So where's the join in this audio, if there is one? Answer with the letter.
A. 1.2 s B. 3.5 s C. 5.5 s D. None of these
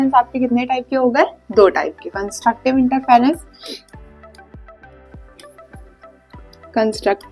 D